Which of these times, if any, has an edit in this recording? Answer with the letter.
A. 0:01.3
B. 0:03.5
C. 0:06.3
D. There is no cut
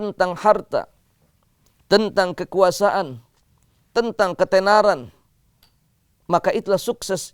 D